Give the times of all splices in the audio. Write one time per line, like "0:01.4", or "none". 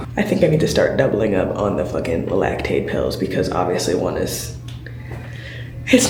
none